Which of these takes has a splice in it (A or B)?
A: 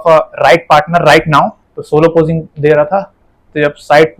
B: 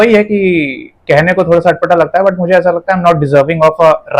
A